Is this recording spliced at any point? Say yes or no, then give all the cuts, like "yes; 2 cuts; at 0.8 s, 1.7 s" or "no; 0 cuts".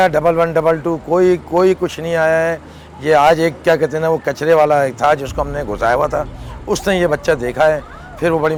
no; 0 cuts